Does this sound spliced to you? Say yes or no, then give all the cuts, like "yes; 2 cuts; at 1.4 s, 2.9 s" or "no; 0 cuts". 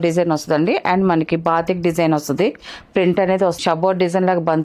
yes; 1 cut; at 3.6 s